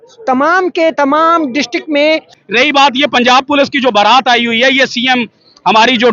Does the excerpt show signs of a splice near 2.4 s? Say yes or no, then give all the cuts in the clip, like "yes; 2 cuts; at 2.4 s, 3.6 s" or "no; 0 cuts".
yes; 1 cut; at 2.4 s